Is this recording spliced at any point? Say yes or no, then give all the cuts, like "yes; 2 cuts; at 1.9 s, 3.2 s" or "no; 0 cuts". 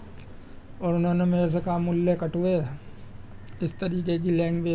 no; 0 cuts